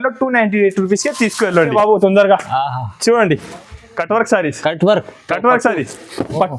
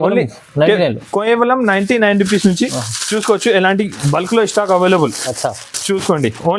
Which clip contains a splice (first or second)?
first